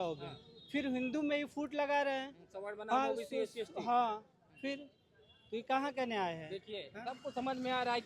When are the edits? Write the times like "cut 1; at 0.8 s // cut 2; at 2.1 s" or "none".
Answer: none